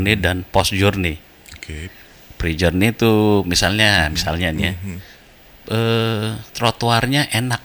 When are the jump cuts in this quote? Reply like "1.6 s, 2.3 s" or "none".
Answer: none